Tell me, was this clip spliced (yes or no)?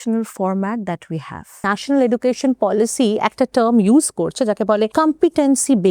yes